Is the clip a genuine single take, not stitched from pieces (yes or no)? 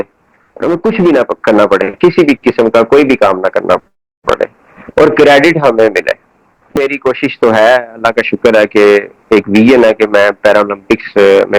no